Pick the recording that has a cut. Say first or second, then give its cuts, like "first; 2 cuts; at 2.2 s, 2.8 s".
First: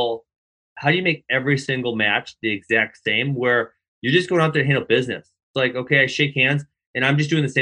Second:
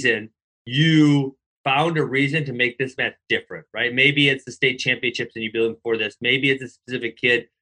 second; 1 cut; at 1.4 s